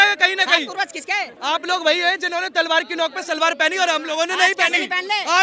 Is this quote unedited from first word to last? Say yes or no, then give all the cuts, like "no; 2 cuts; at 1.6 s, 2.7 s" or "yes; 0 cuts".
no; 1 cut; at 1.3 s